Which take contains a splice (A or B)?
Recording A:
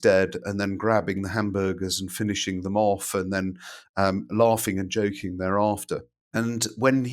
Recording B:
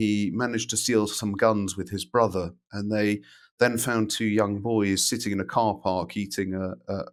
A